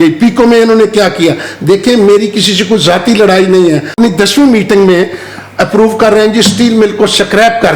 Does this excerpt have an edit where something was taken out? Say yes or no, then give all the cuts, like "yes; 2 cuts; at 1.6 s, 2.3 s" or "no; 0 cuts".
yes; 1 cut; at 3.9 s